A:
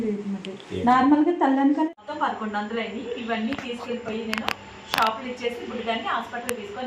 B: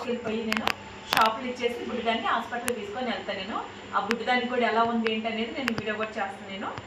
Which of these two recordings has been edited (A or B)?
A